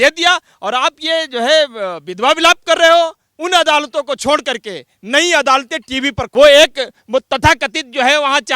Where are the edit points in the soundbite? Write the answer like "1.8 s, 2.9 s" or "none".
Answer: 3.3 s, 6.3 s